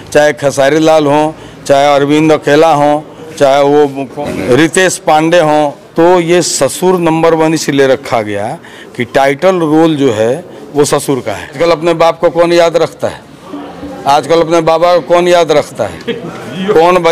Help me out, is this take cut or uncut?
cut